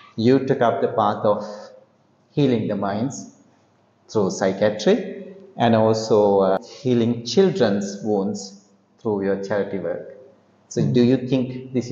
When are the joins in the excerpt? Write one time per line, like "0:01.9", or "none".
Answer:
0:06.6